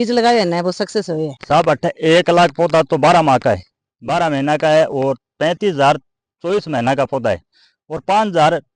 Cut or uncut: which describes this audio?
cut